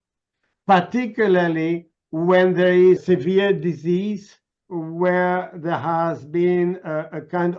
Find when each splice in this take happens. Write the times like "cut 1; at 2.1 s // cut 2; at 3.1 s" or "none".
none